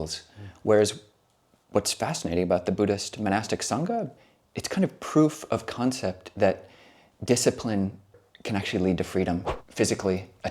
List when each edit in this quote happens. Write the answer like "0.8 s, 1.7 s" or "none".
4.1 s, 8.1 s, 9.5 s